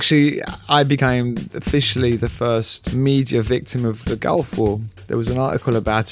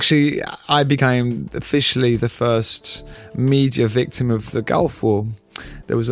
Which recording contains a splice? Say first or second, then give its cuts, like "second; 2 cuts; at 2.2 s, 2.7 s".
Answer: first; 2 cuts; at 2.8 s, 4.9 s